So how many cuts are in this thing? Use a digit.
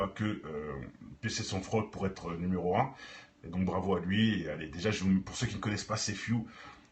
1